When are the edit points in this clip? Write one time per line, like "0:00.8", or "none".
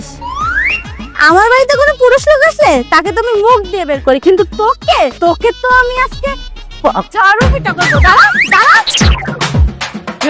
0:08.9